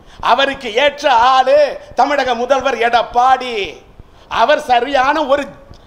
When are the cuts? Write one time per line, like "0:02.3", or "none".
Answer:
none